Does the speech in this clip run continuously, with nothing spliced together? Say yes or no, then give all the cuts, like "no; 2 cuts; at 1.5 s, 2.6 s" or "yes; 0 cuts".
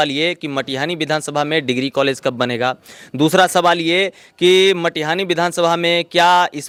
yes; 0 cuts